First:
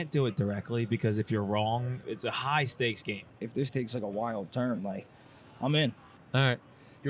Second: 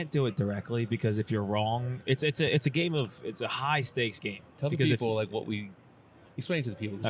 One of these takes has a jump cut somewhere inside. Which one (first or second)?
first